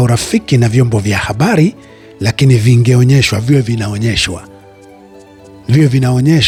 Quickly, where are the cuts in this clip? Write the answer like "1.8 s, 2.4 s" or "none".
none